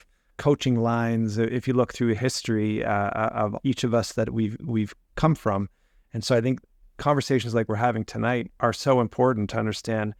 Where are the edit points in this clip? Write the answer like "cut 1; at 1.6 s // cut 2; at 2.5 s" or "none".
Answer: none